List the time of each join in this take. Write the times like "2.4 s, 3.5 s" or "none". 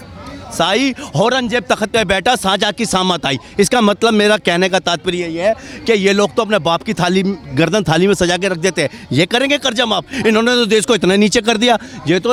none